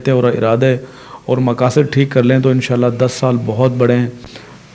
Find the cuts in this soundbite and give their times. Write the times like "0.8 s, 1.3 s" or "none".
none